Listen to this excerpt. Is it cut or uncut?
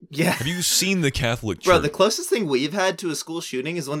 cut